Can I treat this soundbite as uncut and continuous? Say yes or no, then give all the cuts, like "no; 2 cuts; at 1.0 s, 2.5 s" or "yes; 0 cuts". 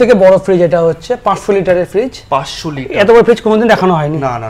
yes; 0 cuts